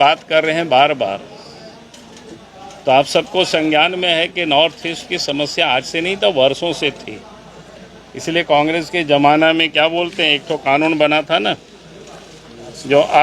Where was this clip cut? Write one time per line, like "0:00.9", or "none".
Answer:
none